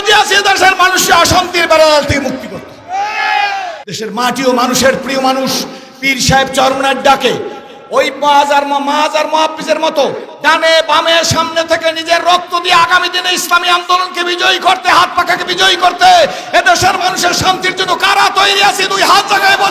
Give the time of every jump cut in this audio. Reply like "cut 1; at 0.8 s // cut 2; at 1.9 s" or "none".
cut 1; at 3.8 s